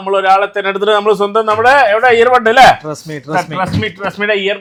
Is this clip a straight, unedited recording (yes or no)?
yes